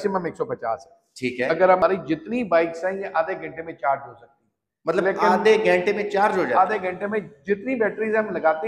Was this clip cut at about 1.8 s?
yes; 1 cut; at 1.8 s

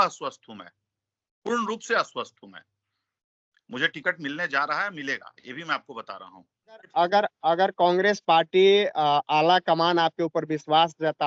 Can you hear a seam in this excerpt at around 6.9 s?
yes; 1 cut; at 6.9 s

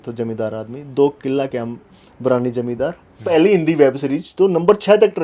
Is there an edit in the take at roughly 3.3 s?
yes; 1 cut; at 3.3 s

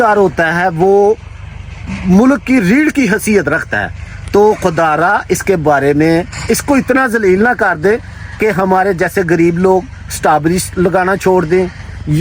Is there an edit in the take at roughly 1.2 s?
no; 0 cuts

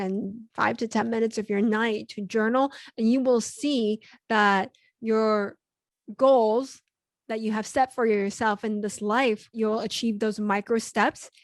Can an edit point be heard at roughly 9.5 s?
yes; 1 cut; at 9.5 s

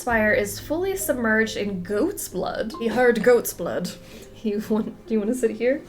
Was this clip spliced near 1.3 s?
no; 1 cut; at 2.7 s

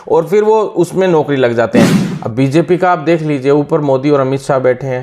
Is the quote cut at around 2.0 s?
yes; 1 cut; at 2.0 s

